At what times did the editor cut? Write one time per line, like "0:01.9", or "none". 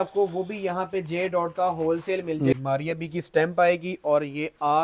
0:02.5